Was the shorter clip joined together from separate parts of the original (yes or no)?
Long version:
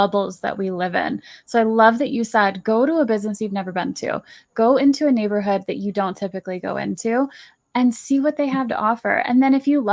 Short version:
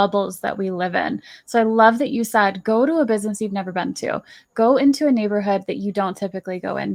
no